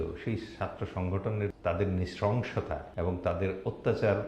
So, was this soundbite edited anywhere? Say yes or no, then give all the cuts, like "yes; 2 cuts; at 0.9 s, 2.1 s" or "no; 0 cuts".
yes; 2 cuts; at 1.5 s, 2.9 s